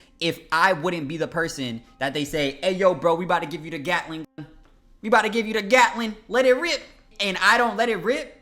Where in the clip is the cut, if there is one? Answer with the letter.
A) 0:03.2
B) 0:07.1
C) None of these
B